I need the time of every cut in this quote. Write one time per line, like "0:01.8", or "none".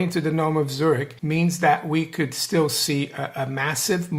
0:01.1